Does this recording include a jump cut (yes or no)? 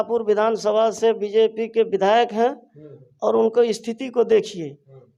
no